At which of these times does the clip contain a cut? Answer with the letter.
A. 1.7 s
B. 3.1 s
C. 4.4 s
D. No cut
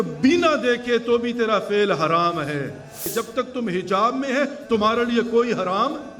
B